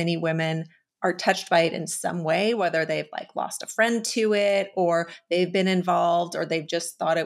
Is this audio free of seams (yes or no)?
yes